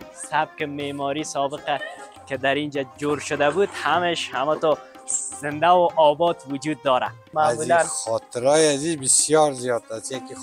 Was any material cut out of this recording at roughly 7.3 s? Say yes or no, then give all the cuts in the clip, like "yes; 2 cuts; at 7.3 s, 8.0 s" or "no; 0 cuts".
yes; 1 cut; at 7.3 s